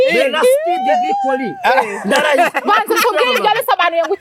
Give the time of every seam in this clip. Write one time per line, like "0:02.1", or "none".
none